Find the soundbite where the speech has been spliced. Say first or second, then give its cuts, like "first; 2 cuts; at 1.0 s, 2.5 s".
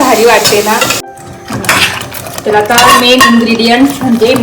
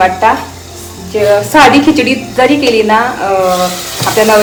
first; 1 cut; at 1.0 s